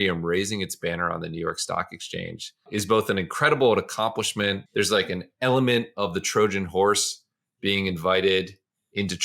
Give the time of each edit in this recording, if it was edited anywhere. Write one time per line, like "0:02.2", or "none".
0:02.6
0:04.6